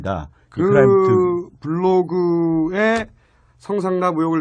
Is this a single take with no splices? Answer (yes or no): no